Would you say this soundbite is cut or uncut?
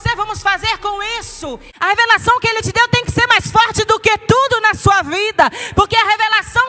cut